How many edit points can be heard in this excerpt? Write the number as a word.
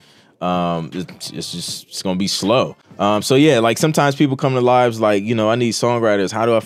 one